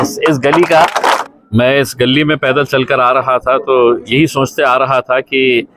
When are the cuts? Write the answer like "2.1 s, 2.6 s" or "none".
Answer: 1.2 s